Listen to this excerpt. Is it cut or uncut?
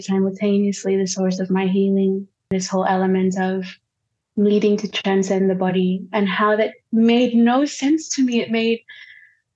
cut